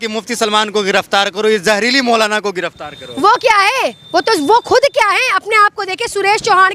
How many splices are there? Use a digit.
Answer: 0